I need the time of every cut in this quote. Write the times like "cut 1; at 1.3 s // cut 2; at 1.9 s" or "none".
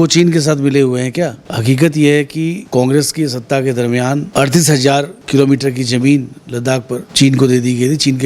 cut 1; at 1.5 s // cut 2; at 2.6 s // cut 3; at 4.3 s // cut 4; at 5.2 s // cut 5; at 7.1 s